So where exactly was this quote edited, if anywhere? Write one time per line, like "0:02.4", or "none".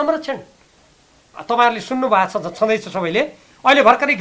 0:01.3